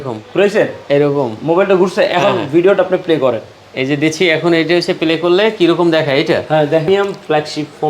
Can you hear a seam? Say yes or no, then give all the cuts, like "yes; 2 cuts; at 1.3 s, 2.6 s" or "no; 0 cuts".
yes; 1 cut; at 6.9 s